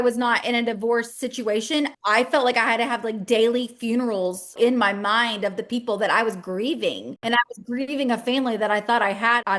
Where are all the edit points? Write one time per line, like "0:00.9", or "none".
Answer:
0:04.5
0:07.2